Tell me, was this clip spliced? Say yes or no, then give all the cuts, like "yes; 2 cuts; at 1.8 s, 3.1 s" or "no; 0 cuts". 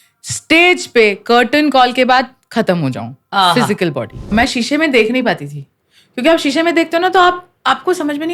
yes; 1 cut; at 4.3 s